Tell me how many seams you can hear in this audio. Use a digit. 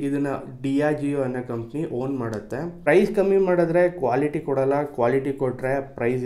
1